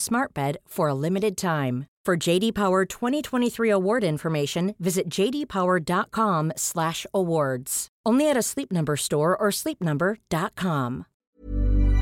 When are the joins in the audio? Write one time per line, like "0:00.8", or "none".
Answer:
0:11.0